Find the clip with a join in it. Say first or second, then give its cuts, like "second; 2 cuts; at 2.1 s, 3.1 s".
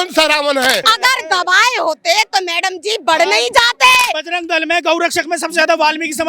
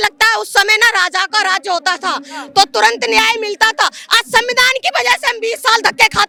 first; 2 cuts; at 0.9 s, 4.2 s